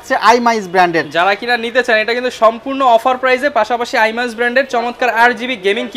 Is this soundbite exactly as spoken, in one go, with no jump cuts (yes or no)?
yes